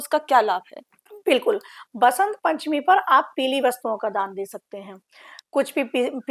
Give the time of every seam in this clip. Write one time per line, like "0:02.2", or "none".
none